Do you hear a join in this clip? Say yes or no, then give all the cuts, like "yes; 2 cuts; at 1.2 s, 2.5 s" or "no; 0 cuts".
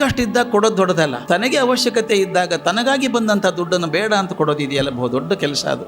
yes; 1 cut; at 1.2 s